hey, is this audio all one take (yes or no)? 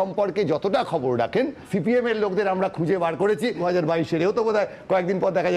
no